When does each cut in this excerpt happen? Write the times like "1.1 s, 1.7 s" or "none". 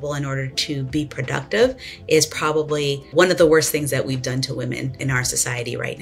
3.1 s, 5.0 s